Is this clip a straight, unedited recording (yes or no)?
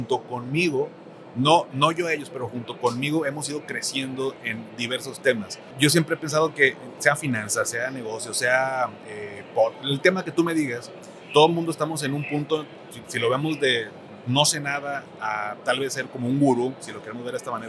no